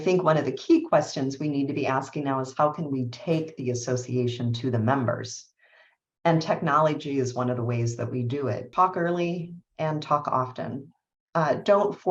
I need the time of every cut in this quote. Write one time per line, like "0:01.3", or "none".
0:08.7